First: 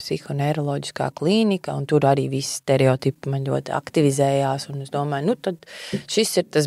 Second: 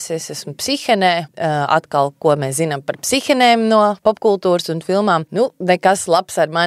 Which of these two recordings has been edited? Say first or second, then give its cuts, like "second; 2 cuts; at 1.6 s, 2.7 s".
second; 2 cuts; at 1.3 s, 5.3 s